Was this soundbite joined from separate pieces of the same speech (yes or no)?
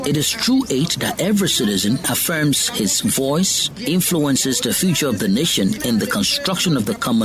yes